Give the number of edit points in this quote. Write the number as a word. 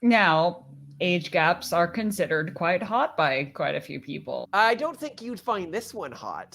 one